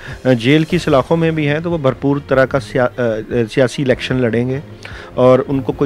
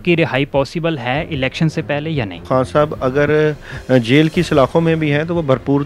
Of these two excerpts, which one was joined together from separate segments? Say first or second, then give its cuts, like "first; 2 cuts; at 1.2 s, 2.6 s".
second; 1 cut; at 2.4 s